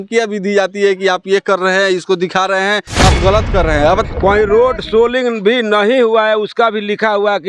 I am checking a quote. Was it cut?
yes; 1 cut; at 4.0 s

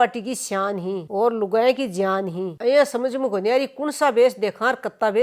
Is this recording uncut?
no; 1 cut; at 2.5 s

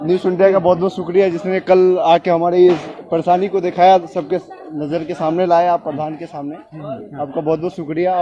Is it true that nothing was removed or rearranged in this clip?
yes; 0 cuts

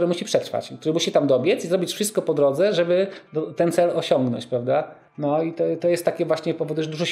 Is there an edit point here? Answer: yes; 1 cut; at 5.0 s

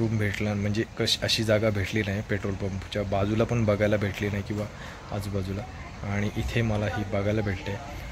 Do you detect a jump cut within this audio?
no; 0 cuts

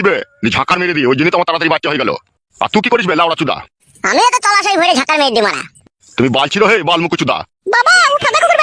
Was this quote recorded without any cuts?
yes; 0 cuts

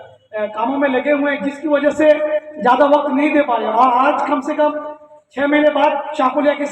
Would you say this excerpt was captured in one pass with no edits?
yes; 0 cuts

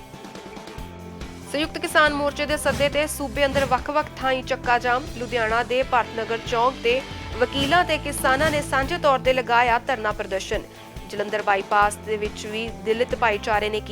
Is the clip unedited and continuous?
no; 1 cut; at 0.9 s

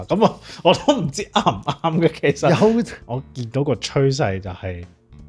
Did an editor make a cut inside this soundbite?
yes; 1 cut; at 3.0 s

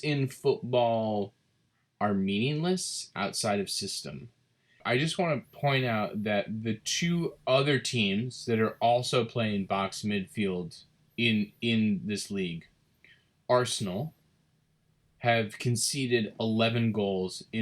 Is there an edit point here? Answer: yes; 1 cut; at 4.8 s

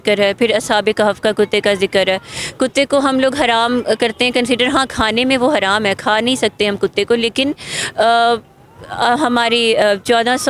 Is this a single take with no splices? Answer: yes; 0 cuts

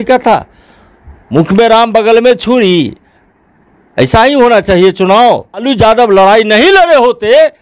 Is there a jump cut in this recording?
yes; 1 cut; at 5.7 s

